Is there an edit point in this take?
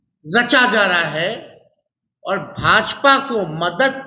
no; 0 cuts

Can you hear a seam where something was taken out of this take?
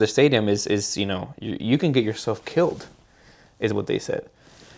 no; 0 cuts

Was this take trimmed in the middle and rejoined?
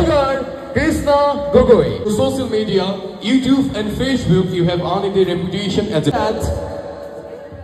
yes; 2 cuts; at 2.1 s, 6.1 s

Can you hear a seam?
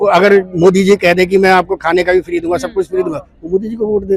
no; 0 cuts

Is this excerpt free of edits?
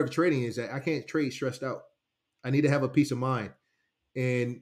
yes; 0 cuts

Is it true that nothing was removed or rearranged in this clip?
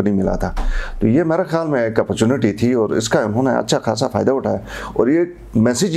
yes; 0 cuts

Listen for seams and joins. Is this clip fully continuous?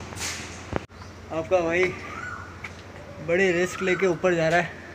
no; 1 cut; at 0.9 s

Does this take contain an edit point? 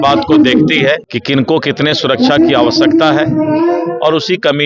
yes; 1 cut; at 1.1 s

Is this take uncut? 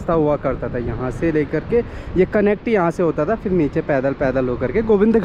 yes; 0 cuts

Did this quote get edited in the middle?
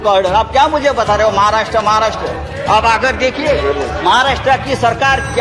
no; 0 cuts

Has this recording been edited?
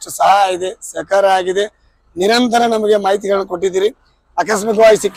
no; 0 cuts

